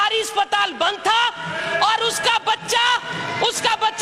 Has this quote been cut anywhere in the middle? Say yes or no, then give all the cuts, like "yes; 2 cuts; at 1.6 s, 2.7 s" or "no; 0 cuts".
no; 0 cuts